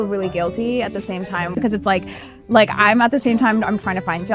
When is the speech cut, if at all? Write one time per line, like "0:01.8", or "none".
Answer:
0:01.5